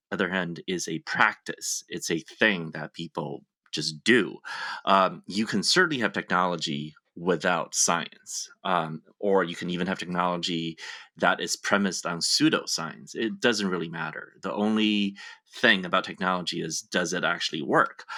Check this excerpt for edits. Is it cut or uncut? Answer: uncut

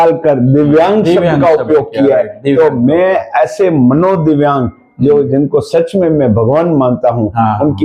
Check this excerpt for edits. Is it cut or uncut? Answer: cut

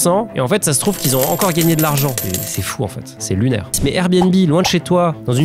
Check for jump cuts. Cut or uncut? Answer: cut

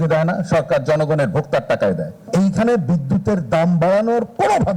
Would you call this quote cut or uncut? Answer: cut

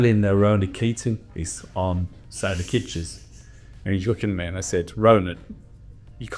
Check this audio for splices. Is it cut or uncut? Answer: uncut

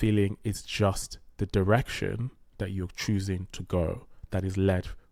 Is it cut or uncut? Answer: uncut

